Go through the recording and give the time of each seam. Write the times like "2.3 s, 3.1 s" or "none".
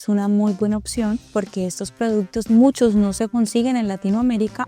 none